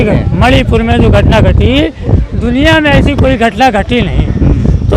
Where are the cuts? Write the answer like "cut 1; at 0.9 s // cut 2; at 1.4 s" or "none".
none